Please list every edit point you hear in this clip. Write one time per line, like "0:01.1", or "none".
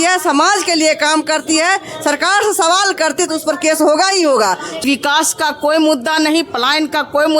0:04.8